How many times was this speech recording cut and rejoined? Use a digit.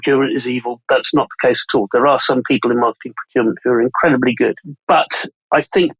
2